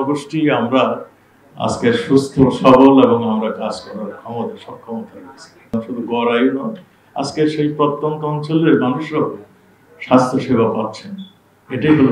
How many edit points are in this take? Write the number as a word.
one